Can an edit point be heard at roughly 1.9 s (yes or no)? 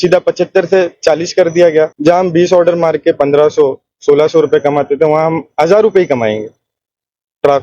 yes